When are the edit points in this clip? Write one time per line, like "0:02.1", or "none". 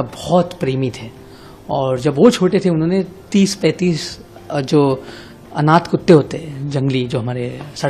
none